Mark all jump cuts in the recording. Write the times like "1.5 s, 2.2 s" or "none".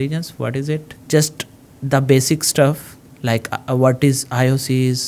0.9 s